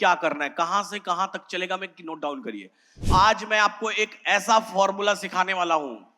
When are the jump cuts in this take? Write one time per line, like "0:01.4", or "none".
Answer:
0:03.1